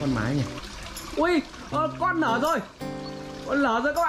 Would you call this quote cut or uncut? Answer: uncut